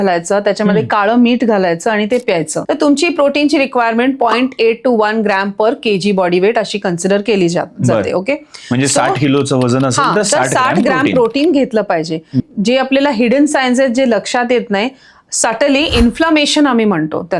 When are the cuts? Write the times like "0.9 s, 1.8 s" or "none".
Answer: 2.6 s, 12.5 s